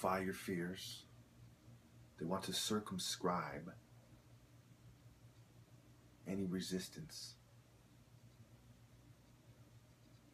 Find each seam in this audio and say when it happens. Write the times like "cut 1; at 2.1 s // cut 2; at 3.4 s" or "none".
none